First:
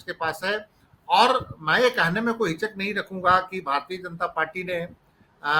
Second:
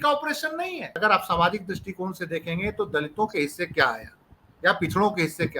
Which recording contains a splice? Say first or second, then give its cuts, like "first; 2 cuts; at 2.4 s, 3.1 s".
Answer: second; 1 cut; at 1.0 s